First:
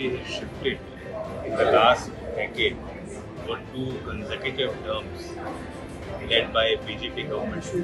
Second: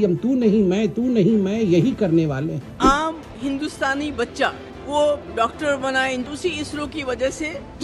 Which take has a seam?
second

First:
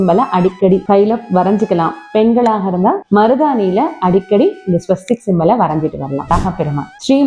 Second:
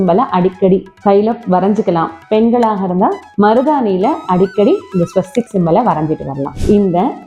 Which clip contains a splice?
first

